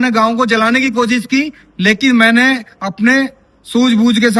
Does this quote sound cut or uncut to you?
uncut